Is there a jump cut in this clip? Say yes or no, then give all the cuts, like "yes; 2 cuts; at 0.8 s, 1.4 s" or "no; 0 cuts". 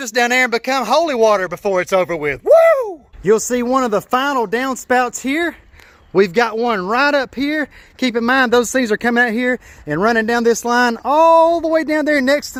no; 0 cuts